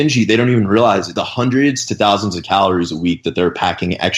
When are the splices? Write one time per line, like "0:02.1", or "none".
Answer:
0:01.2